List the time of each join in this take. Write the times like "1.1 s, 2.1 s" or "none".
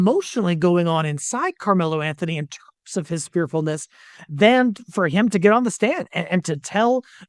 none